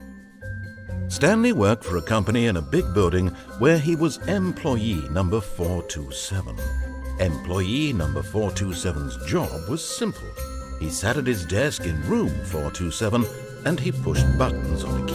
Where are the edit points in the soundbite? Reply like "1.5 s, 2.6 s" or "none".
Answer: 1.2 s